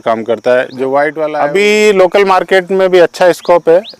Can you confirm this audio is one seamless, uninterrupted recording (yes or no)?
no